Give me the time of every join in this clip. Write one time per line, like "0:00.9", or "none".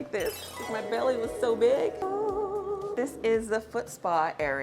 none